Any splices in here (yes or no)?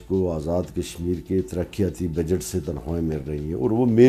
no